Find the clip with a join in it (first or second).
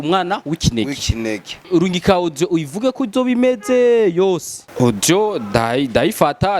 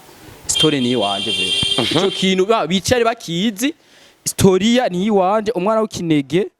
first